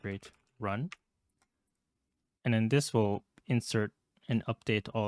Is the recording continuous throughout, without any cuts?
yes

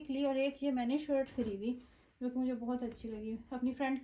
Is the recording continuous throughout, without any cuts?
yes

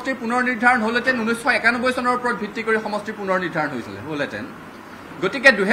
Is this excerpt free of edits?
yes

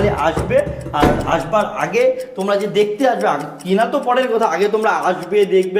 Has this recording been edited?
no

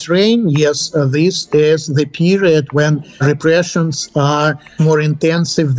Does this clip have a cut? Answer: no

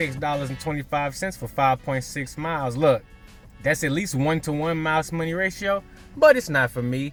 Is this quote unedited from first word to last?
yes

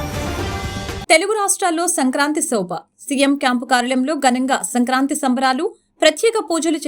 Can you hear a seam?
yes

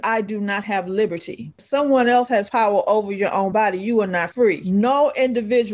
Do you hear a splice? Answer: yes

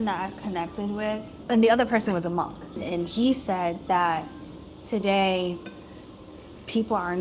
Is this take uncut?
no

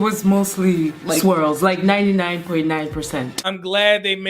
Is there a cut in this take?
no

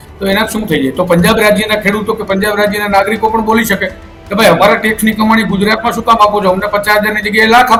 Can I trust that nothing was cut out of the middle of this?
yes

